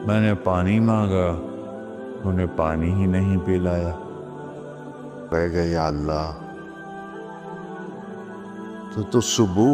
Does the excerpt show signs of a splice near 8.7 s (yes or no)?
yes